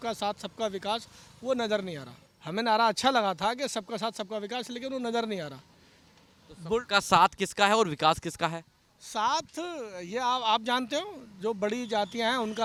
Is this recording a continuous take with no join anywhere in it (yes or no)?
yes